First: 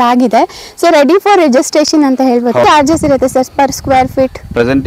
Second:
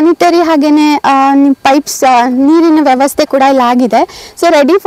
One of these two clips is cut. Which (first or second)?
first